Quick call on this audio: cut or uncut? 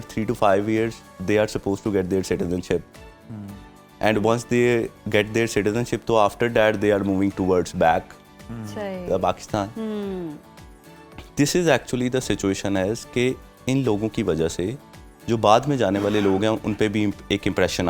uncut